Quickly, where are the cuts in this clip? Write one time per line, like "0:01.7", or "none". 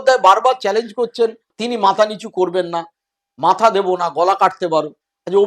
0:01.5

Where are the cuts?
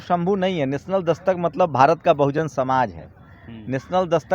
none

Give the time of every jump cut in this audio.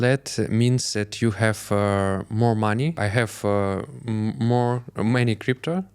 0:03.0

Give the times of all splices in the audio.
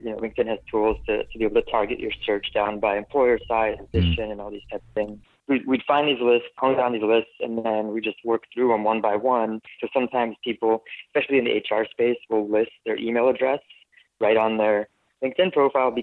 0:03.9
0:05.3
0:06.5
0:09.8

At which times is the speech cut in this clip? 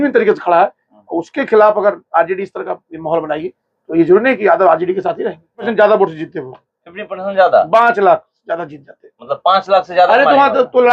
0:05.6

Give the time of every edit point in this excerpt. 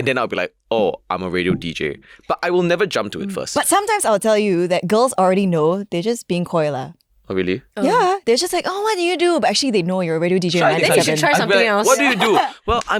none

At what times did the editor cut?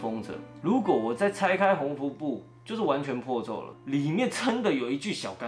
0:03.7

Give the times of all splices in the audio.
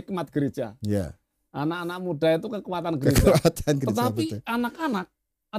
none

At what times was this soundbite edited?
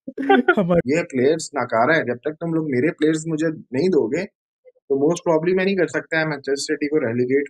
0:00.8
0:05.9

